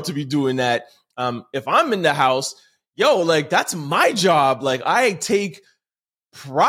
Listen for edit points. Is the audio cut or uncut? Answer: uncut